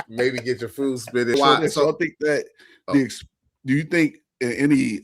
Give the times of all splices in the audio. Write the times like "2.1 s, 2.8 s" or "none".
1.3 s